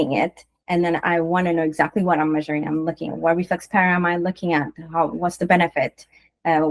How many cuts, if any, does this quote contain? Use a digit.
0